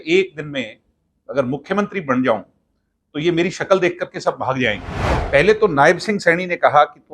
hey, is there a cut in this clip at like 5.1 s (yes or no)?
yes